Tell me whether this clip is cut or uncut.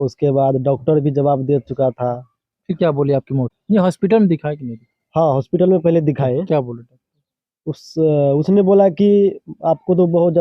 cut